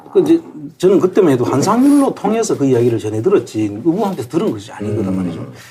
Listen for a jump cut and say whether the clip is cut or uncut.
cut